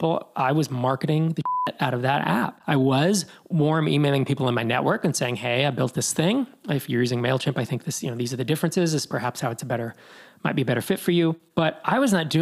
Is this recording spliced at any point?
yes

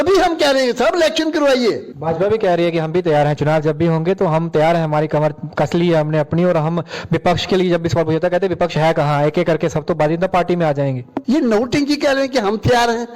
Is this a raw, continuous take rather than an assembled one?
no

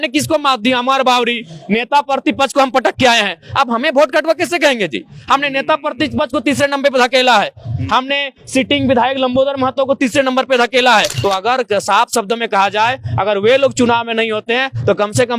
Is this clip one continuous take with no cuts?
no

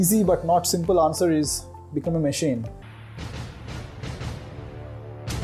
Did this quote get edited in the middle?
no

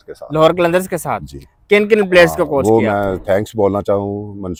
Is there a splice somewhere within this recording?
no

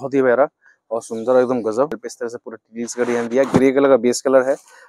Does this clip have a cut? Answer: yes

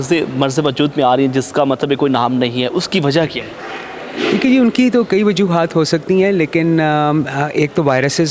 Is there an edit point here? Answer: no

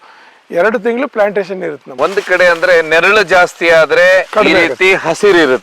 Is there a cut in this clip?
yes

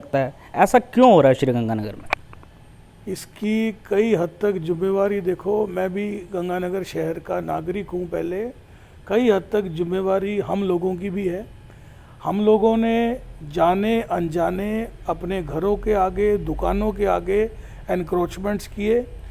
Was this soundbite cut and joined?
no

